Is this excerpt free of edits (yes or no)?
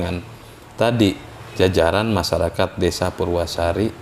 yes